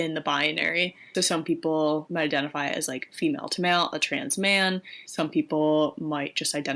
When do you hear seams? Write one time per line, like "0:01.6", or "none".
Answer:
0:01.0
0:02.1
0:05.0